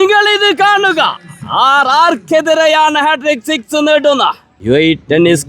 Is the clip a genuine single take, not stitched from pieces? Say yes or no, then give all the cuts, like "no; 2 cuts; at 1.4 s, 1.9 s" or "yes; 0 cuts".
no; 1 cut; at 4.5 s